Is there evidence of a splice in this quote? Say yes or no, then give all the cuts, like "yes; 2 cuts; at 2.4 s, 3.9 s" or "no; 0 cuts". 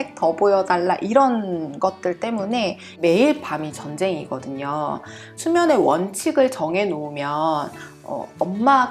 yes; 2 cuts; at 2.9 s, 5.3 s